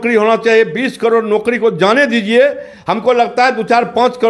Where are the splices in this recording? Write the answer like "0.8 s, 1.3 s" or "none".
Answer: none